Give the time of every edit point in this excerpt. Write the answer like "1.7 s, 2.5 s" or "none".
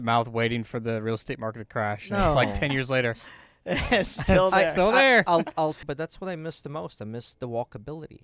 5.8 s

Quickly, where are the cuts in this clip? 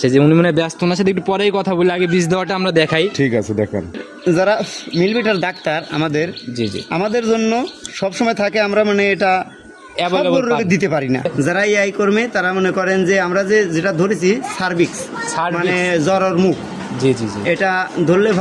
4.1 s, 11.3 s

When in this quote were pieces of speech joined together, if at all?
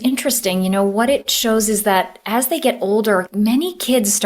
3.3 s

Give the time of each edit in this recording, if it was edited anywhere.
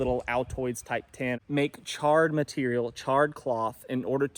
1.4 s

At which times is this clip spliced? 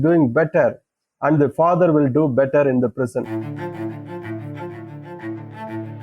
3.4 s

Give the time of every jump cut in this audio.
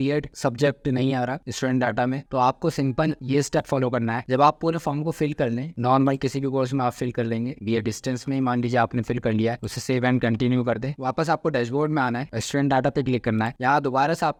none

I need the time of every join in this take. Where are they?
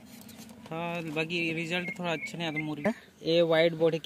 2.9 s

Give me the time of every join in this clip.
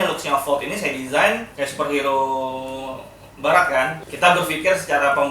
1.5 s, 4.0 s

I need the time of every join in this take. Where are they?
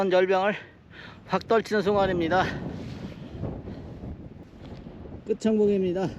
4.4 s

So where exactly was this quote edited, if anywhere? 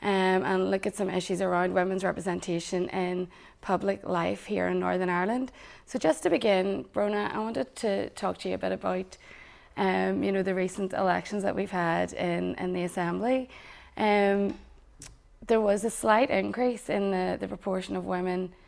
none

